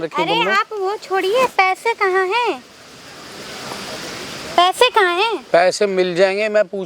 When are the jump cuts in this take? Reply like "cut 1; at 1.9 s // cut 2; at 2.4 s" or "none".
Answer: none